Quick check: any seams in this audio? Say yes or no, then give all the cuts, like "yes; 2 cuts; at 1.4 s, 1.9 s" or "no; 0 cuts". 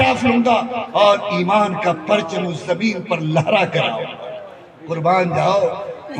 no; 0 cuts